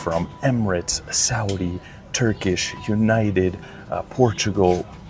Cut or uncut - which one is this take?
uncut